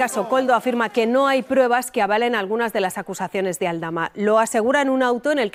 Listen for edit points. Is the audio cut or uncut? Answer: uncut